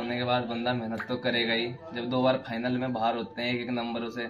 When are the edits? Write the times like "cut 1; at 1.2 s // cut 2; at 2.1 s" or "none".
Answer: none